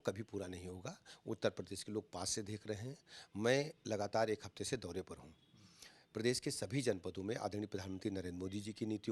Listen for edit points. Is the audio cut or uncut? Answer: uncut